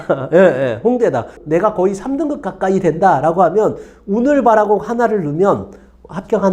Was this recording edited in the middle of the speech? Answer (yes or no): yes